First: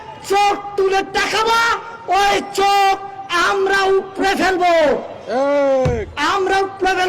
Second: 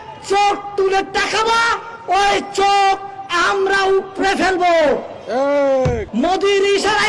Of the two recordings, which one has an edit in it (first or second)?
second